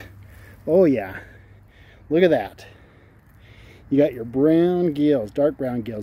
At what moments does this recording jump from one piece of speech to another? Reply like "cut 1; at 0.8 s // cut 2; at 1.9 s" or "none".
none